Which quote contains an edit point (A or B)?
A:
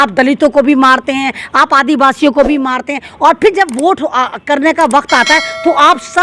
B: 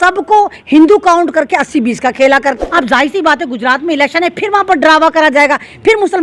B